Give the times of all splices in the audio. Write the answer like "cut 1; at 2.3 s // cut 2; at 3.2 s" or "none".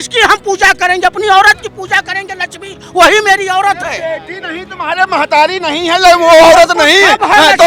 none